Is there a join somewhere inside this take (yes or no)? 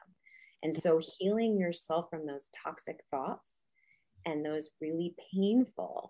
no